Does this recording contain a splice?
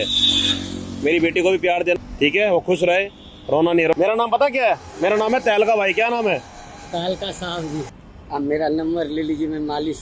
yes; 3 cuts; at 2.0 s, 3.9 s, 7.8 s

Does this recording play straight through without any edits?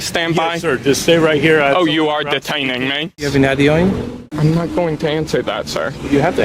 no; 2 cuts; at 3.2 s, 4.4 s

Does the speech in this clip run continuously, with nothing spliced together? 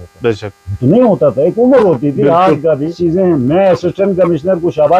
no; 1 cut; at 3.0 s

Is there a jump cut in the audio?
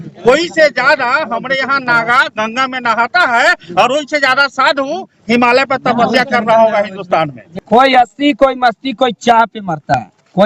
yes; 1 cut; at 7.5 s

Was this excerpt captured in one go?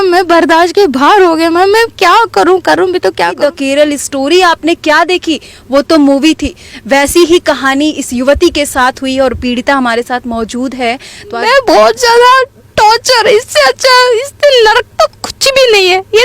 no; 2 cuts; at 3.4 s, 11.4 s

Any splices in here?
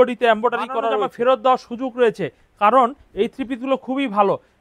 yes; 1 cut; at 0.9 s

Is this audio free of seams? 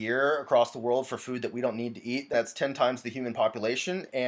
no; 1 cut; at 2.3 s

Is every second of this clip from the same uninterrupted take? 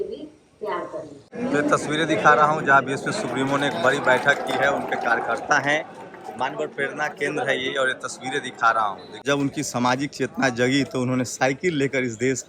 no; 2 cuts; at 1.2 s, 9.2 s

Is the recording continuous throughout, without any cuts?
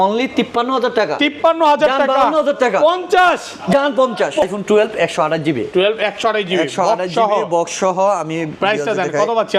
no; 1 cut; at 4.4 s

